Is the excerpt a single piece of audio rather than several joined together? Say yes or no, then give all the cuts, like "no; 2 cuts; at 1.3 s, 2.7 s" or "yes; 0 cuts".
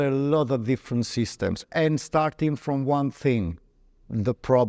yes; 0 cuts